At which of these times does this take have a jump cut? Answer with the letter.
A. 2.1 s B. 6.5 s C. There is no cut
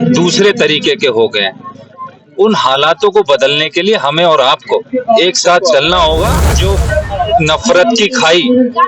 B